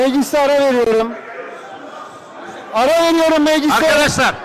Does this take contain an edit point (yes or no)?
no